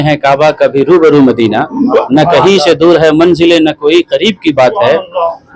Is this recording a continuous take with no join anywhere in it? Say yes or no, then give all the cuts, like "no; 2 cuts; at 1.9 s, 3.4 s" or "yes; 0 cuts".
yes; 0 cuts